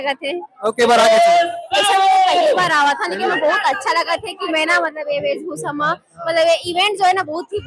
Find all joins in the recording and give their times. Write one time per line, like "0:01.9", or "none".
none